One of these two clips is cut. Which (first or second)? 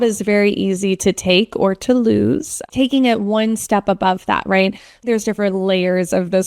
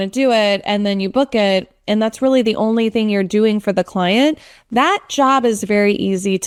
first